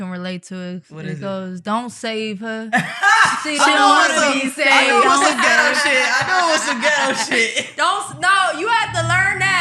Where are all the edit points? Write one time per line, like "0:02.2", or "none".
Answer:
none